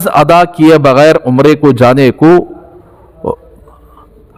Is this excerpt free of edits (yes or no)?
yes